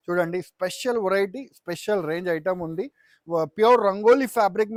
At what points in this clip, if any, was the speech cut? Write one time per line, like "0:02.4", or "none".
none